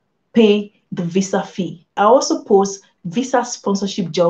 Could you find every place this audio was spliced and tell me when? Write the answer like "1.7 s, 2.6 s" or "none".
1.9 s